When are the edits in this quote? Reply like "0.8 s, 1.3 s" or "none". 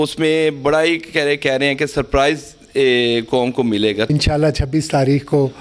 4.1 s